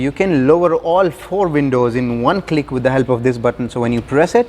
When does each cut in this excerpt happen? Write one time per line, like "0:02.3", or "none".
none